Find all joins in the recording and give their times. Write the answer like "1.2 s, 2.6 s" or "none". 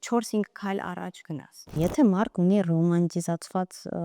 1.7 s

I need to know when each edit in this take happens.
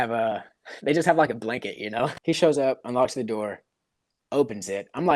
2.2 s

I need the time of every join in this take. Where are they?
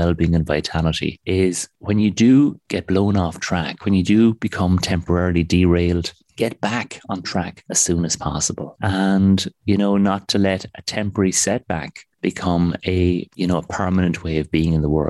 none

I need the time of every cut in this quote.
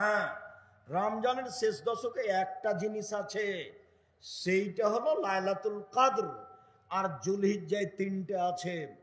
none

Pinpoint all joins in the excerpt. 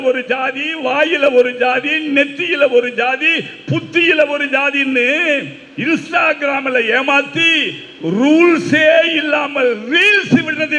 none

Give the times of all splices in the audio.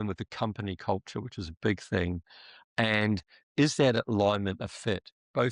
none

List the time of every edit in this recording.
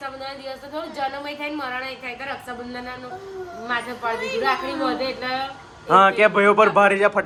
none

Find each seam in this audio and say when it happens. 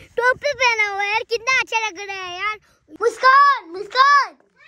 2.7 s

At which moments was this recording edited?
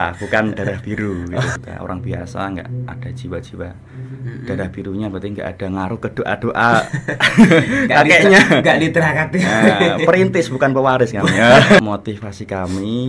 1.5 s, 11.8 s

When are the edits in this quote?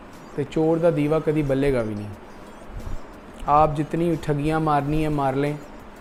none

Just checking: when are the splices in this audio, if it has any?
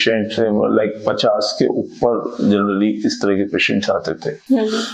none

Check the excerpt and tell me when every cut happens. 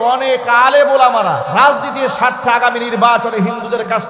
1.4 s

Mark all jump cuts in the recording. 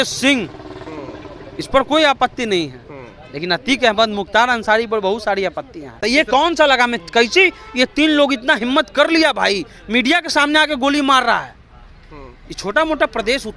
5.9 s

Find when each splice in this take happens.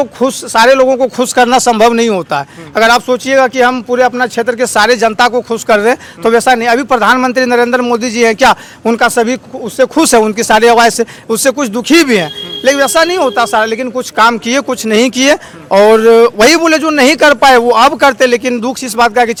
none

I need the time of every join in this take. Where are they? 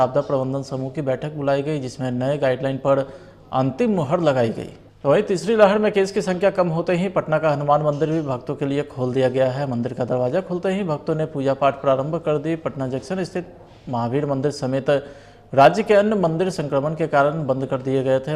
5.0 s

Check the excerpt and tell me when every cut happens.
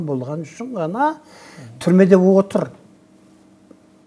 none

